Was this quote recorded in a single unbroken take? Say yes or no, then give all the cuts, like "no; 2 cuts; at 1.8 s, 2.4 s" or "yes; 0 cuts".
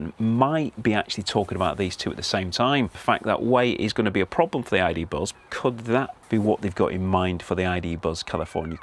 no; 3 cuts; at 3.0 s, 5.4 s, 6.2 s